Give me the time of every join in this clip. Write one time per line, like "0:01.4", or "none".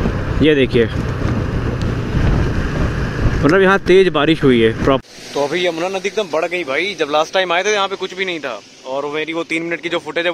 0:05.0

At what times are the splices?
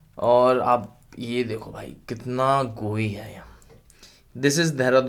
none

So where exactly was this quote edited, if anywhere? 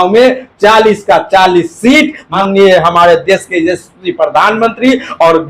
0:02.3

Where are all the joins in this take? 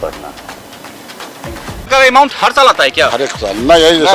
0:01.9

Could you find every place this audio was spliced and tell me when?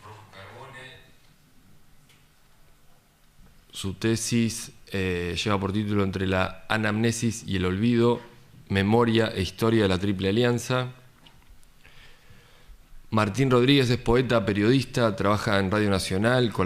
0:03.8

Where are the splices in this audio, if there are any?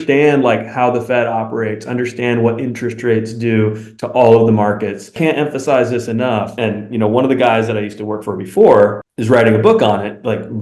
0:05.1
0:06.5

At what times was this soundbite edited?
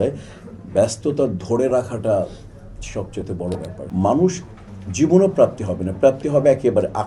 0:03.8

